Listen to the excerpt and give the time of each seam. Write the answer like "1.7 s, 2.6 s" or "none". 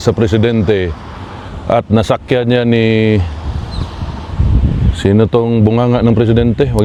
none